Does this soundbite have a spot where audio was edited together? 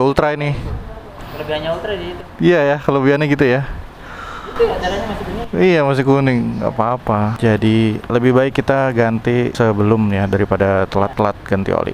yes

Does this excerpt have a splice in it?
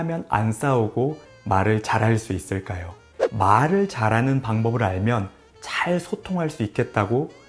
yes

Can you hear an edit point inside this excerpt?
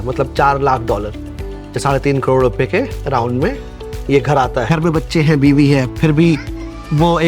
yes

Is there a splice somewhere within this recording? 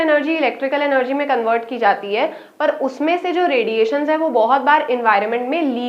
no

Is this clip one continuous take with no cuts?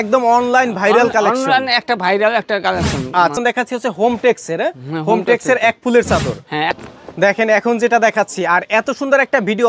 no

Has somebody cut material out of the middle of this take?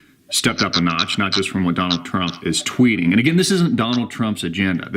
yes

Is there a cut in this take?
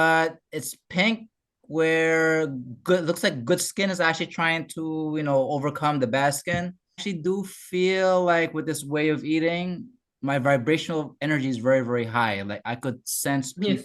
yes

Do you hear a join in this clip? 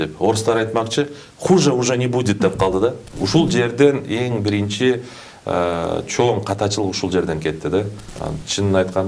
yes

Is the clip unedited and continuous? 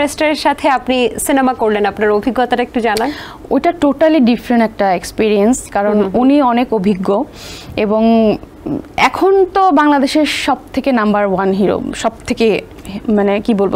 yes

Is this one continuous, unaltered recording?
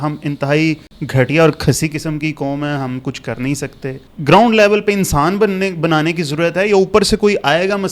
no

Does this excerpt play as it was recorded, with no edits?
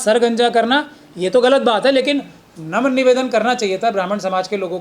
yes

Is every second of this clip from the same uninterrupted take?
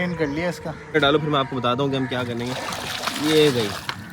no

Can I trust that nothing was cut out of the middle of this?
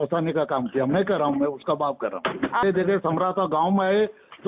no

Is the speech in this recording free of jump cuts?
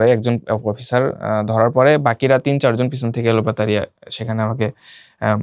yes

